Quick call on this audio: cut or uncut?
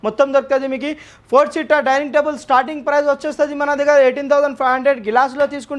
uncut